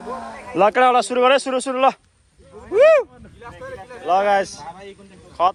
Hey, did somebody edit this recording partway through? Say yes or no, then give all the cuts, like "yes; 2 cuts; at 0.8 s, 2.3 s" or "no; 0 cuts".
no; 0 cuts